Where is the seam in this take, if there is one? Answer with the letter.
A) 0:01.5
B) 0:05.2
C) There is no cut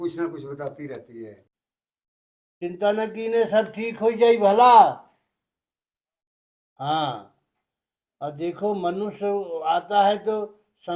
A